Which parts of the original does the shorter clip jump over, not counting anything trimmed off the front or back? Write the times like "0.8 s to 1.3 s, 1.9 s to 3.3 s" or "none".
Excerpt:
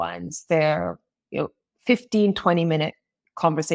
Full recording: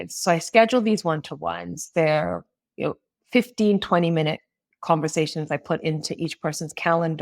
none